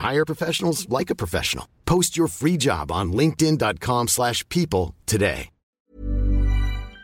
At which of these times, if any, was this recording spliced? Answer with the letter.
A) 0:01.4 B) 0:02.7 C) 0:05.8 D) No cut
C